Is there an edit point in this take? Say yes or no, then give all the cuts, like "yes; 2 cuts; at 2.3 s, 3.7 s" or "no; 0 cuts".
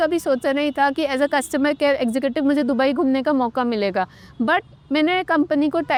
no; 0 cuts